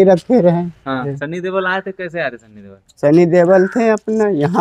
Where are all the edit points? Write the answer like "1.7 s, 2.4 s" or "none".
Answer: 1.2 s

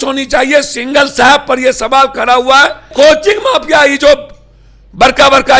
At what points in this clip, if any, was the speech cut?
2.9 s

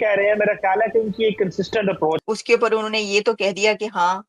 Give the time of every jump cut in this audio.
2.2 s

